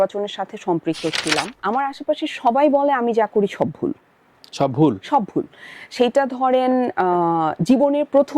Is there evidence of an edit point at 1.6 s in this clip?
yes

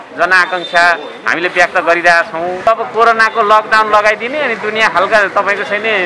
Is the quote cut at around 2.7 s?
yes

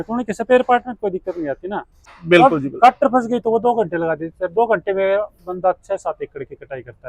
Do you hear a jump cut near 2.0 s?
yes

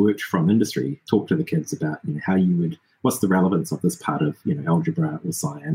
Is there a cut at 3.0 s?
no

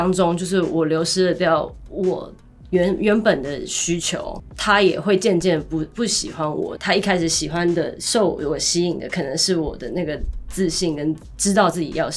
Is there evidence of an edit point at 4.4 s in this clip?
yes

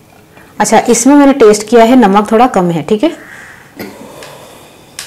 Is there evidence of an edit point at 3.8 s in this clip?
yes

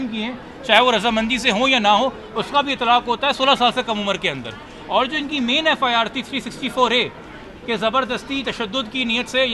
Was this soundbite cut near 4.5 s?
no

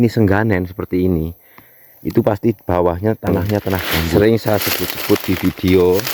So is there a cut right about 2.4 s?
no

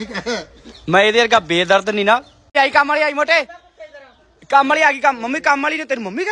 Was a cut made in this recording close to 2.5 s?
yes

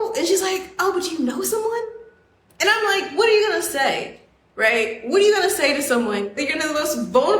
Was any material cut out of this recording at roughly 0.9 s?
no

